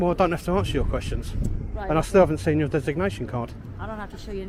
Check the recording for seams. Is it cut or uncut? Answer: uncut